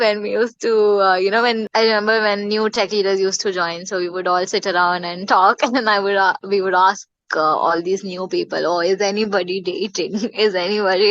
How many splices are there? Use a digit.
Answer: 1